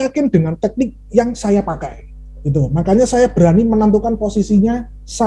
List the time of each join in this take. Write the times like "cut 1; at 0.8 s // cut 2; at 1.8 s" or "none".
none